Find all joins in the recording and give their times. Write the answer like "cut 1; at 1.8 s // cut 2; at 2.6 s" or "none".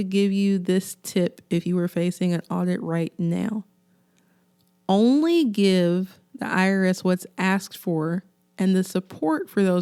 none